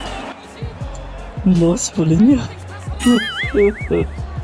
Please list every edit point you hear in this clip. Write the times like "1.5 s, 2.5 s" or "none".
none